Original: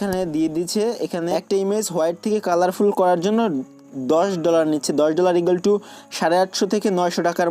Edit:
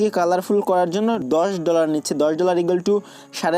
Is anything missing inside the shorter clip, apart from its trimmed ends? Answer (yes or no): yes